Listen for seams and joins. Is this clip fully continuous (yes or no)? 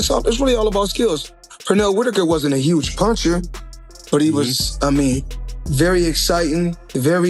yes